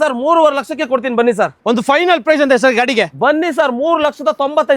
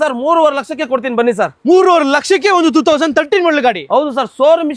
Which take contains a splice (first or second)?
first